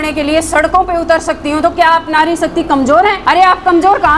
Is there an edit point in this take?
yes; 1 cut; at 3.2 s

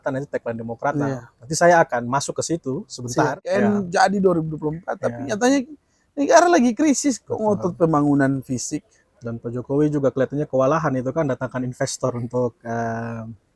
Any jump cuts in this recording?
yes; 1 cut; at 3.4 s

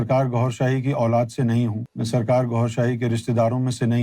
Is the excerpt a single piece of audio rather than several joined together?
yes; 0 cuts

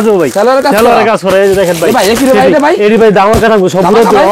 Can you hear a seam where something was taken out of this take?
no; 0 cuts

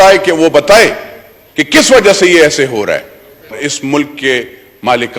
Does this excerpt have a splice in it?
yes; 1 cut; at 3.5 s

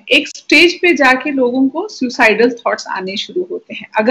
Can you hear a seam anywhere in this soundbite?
no; 0 cuts

